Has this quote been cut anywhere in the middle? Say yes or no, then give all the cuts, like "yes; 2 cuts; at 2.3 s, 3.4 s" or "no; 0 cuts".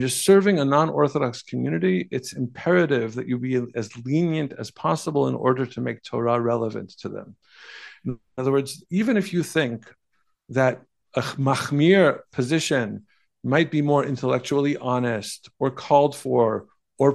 no; 0 cuts